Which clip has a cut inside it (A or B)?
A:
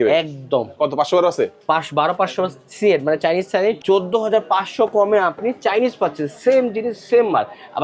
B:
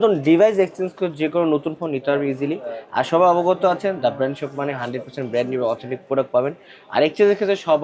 A